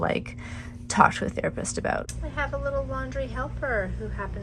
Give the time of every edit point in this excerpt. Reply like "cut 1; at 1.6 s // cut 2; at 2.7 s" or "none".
cut 1; at 2.1 s